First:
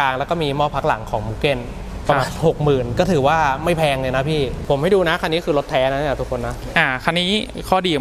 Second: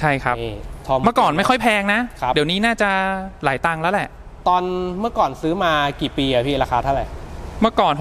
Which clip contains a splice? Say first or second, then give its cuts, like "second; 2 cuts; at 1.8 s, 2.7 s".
first; 1 cut; at 4.6 s